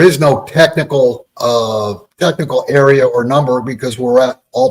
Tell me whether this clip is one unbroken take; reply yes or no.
no